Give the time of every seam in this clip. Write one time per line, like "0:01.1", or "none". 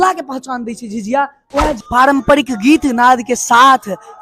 0:01.8